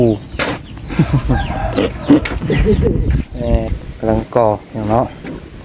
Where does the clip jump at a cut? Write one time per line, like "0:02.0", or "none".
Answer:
0:03.8

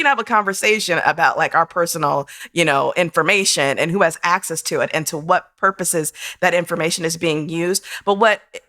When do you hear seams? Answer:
none

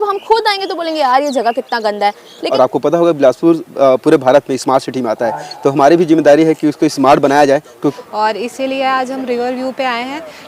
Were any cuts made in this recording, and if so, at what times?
0:02.3
0:07.9

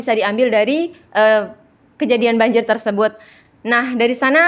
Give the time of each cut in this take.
none

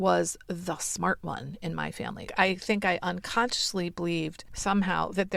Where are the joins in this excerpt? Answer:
0:02.3
0:04.5

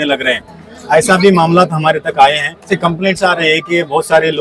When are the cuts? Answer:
0:02.7

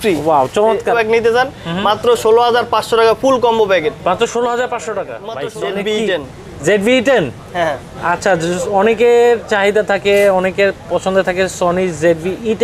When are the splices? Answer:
0:01.0
0:05.2

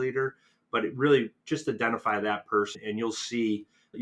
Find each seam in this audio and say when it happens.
none

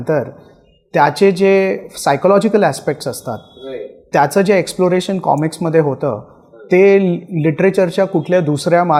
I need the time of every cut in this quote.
none

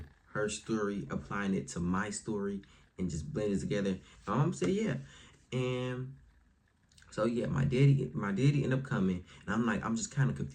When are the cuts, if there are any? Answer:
none

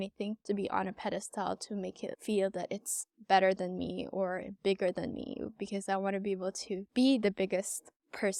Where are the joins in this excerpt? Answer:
none

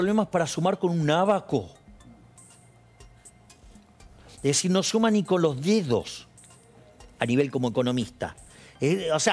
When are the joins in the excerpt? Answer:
none

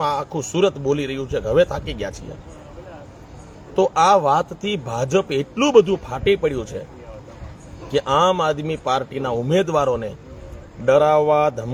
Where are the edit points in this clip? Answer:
none

